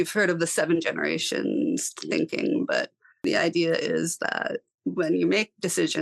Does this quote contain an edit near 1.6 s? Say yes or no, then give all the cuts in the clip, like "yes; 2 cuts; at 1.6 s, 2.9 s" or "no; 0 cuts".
no; 1 cut; at 3.2 s